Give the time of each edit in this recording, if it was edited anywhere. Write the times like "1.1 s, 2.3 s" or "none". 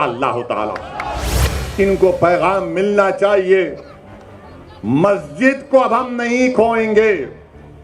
1.2 s